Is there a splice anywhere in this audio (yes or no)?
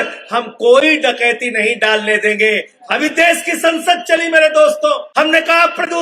yes